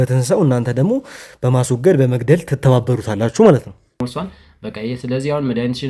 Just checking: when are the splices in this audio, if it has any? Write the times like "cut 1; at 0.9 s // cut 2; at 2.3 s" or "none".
cut 1; at 4.0 s